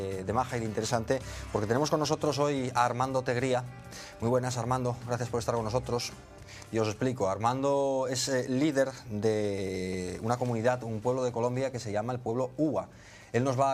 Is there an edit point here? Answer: yes; 1 cut; at 2.4 s

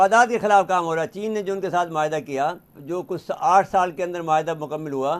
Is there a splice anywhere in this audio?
yes; 1 cut; at 2.8 s

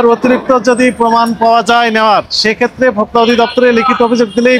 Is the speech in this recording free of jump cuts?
yes; 0 cuts

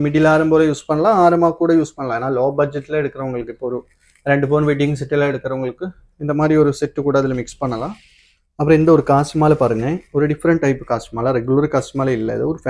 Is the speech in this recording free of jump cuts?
no; 1 cut; at 8.6 s

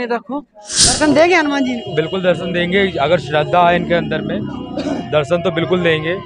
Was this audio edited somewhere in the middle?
yes; 1 cut; at 1.0 s

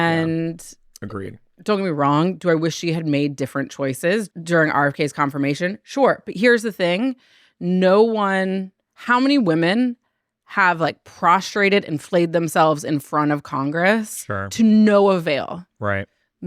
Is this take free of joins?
no; 1 cut; at 4.3 s

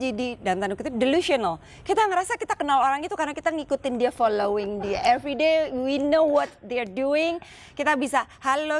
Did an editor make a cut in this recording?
no; 0 cuts

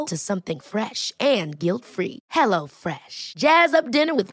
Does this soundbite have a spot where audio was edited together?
no; 0 cuts

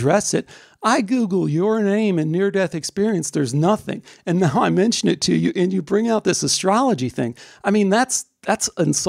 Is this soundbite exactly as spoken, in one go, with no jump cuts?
yes; 0 cuts

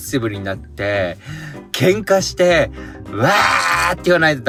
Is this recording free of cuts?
yes; 0 cuts

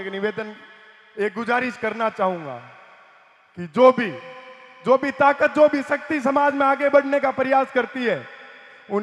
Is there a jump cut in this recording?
no; 0 cuts

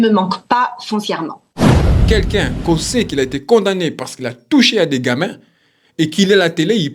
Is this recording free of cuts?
no; 2 cuts; at 1.4 s, 2.1 s

